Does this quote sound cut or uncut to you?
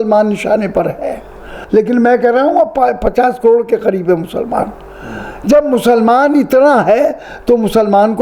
cut